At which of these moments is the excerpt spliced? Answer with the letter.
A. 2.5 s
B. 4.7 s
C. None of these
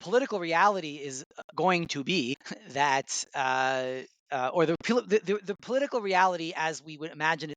A